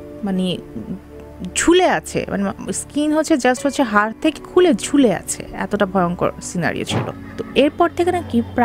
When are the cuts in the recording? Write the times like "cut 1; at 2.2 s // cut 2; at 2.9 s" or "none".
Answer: cut 1; at 7.2 s